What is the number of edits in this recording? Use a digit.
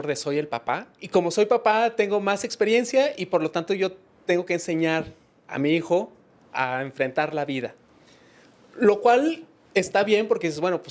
1